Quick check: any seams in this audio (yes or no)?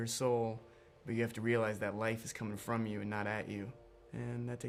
no